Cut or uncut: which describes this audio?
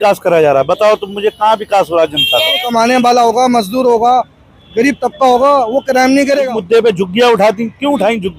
cut